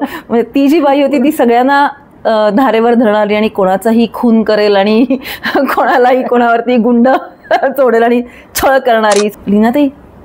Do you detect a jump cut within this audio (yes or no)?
yes